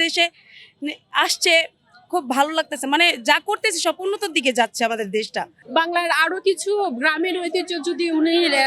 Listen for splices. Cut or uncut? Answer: cut